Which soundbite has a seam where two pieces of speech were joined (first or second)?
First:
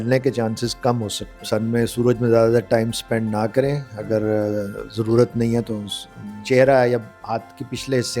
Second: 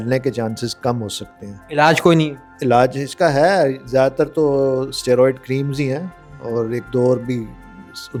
first